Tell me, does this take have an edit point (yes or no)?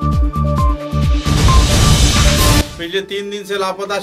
yes